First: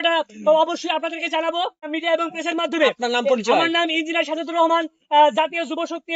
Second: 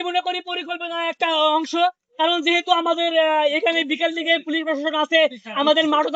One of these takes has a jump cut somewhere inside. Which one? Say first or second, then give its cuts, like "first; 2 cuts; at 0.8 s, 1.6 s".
first; 1 cut; at 1.9 s